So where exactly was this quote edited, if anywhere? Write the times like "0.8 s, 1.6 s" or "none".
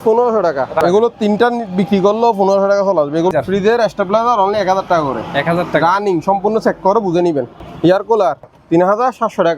0.8 s, 3.3 s, 7.6 s, 8.5 s